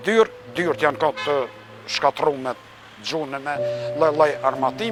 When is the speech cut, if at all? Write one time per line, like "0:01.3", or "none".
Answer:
none